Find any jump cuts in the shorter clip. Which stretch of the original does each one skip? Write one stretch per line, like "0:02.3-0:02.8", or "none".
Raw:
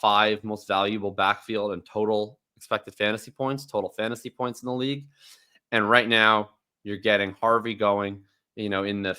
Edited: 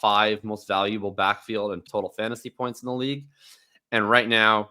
0:01.8-0:03.6